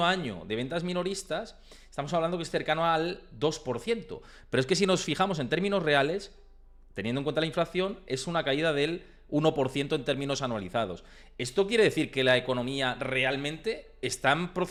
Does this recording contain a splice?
no; 0 cuts

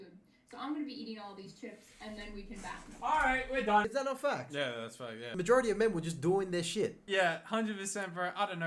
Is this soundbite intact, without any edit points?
no; 2 cuts; at 3.9 s, 7.0 s

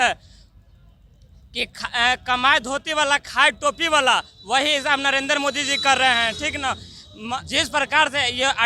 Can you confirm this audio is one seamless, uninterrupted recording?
no; 1 cut; at 7.4 s

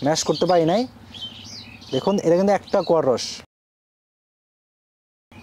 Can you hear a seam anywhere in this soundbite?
no; 0 cuts

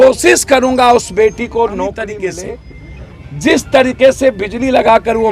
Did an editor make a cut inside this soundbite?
yes; 1 cut; at 2.0 s

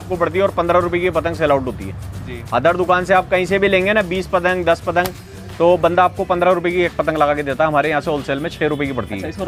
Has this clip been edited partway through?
no; 0 cuts

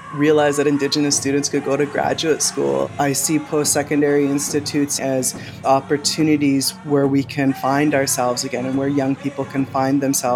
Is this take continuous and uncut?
no; 2 cuts; at 2.9 s, 5.0 s

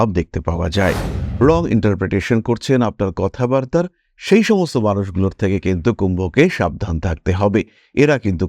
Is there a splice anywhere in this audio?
yes; 1 cut; at 1.2 s

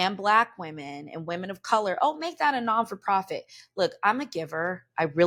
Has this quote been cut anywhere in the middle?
no; 0 cuts

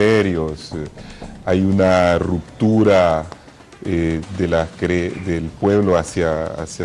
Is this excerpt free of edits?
no; 1 cut; at 3.1 s

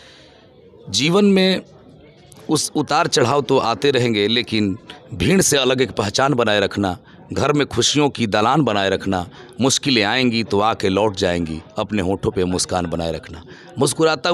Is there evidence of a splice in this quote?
no; 0 cuts

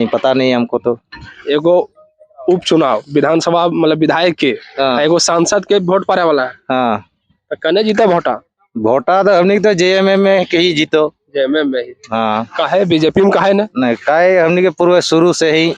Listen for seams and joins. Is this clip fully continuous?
yes; 0 cuts

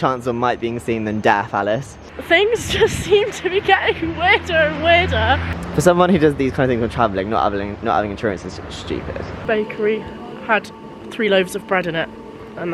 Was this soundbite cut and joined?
yes; 3 cuts; at 2.1 s, 5.5 s, 9.4 s

